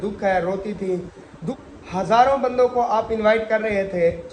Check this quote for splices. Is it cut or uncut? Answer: cut